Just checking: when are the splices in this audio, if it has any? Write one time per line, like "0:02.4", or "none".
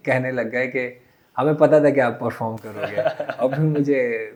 none